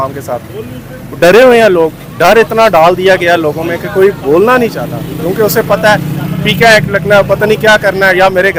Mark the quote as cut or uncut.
uncut